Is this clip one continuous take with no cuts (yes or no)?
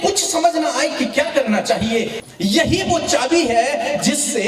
no